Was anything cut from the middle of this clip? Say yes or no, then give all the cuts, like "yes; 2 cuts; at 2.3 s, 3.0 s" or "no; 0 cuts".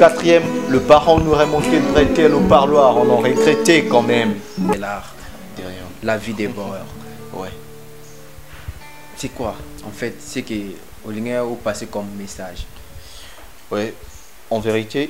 yes; 1 cut; at 4.7 s